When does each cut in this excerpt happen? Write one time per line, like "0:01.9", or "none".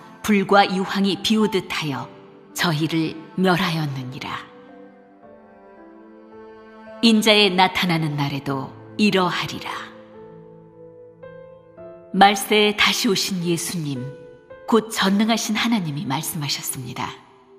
0:16.0